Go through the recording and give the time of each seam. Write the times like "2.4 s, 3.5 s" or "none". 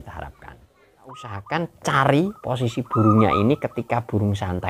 1.3 s